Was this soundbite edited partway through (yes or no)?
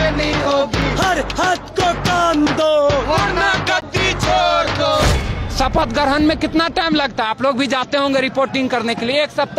yes